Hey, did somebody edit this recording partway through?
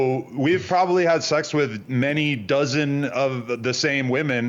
no; 0 cuts

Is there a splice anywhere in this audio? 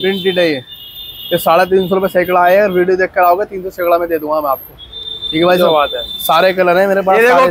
no; 0 cuts

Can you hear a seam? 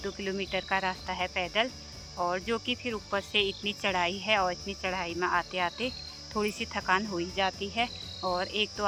no; 0 cuts

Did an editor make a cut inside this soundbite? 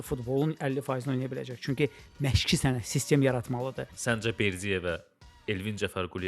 yes; 1 cut; at 3.9 s

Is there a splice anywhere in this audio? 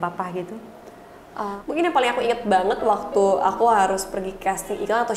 yes; 1 cut; at 1.5 s

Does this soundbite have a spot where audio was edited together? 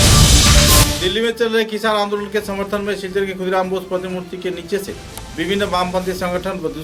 no; 0 cuts

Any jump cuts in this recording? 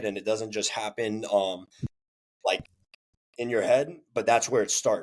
no; 0 cuts

